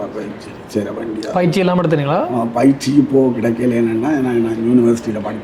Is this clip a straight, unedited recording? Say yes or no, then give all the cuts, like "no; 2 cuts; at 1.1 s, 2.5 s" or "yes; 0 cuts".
yes; 0 cuts